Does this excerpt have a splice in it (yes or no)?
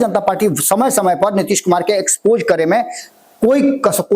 no